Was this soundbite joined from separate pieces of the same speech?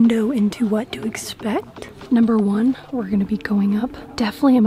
no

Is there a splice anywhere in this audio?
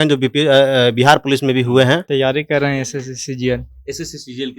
yes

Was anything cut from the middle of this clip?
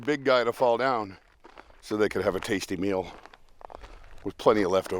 no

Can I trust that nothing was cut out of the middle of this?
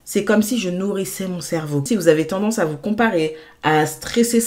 no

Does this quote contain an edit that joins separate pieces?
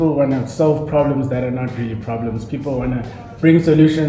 no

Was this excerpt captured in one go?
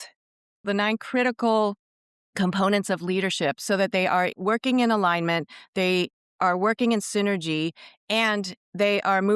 no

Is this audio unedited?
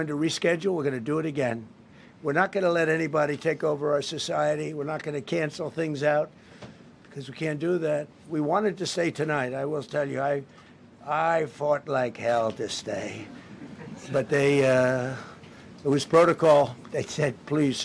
yes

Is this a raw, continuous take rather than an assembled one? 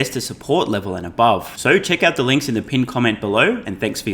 yes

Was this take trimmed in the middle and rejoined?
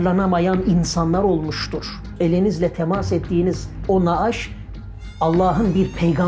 yes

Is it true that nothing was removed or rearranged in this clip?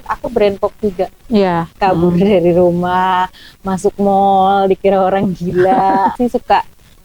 no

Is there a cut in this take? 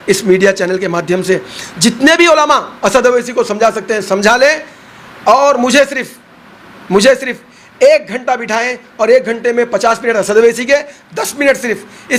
no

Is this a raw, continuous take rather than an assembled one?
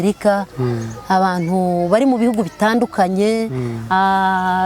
yes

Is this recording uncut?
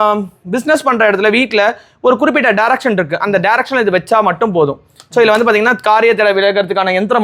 yes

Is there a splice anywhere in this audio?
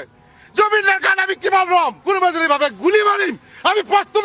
yes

